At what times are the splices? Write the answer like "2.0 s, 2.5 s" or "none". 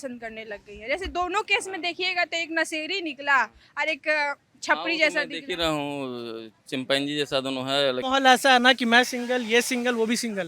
8.0 s